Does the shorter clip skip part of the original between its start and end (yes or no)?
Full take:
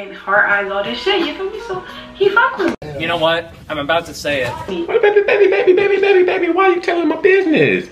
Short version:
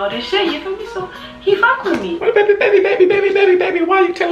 yes